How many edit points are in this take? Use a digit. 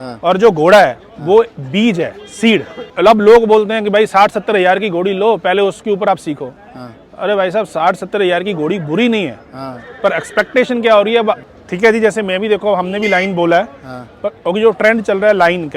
2